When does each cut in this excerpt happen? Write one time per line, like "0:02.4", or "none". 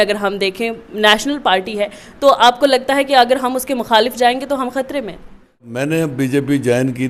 0:05.7